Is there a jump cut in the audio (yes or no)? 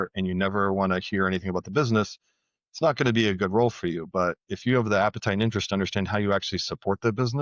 no